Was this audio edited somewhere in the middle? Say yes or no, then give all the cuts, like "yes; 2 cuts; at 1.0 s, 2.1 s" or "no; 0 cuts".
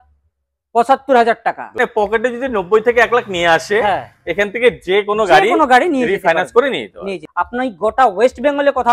yes; 2 cuts; at 1.8 s, 6.7 s